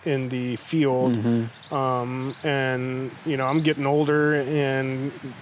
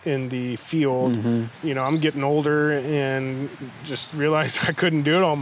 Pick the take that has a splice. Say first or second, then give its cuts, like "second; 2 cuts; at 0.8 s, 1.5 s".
second; 1 cut; at 1.5 s